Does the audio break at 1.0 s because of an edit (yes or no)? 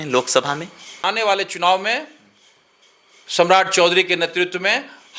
yes